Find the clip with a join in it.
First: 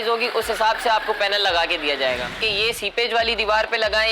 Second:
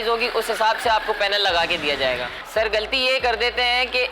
first; 1 cut; at 2.4 s

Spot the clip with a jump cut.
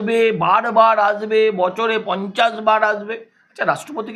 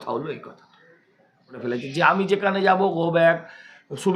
second; 1 cut; at 1.6 s

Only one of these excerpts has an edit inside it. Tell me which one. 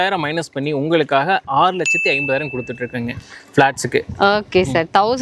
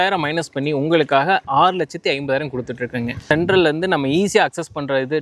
second; 1 cut; at 3.2 s

